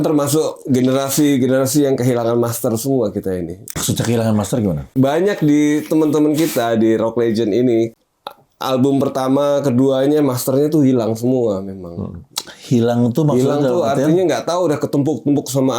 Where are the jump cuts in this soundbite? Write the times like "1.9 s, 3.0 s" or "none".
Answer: 3.6 s, 4.8 s, 7.9 s